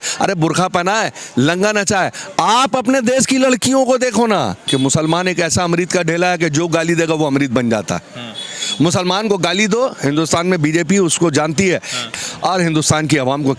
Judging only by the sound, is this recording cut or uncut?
cut